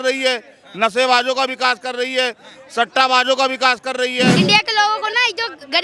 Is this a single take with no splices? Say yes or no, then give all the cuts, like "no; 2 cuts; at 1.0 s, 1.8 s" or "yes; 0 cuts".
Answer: no; 1 cut; at 4.4 s